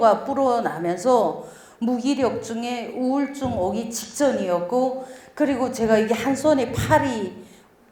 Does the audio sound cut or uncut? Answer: uncut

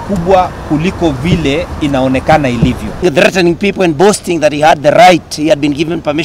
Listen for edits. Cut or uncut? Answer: cut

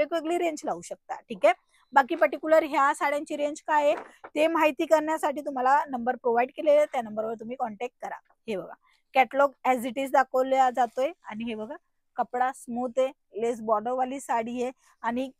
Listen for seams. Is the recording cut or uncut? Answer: uncut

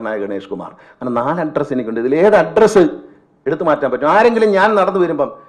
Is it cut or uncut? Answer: uncut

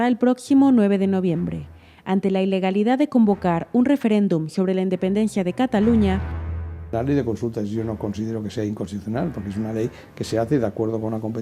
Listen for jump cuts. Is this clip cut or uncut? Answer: cut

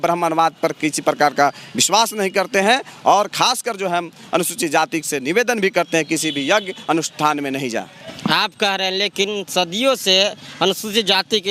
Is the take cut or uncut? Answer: uncut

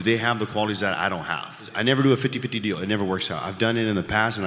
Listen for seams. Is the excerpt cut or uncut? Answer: cut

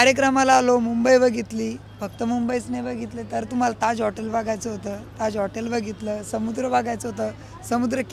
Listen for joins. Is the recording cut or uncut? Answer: uncut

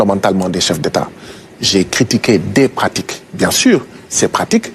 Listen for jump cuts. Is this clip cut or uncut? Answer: uncut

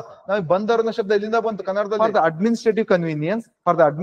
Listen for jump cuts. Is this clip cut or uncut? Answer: cut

